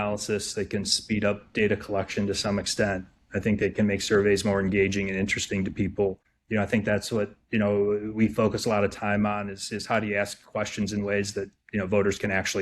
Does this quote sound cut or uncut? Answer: cut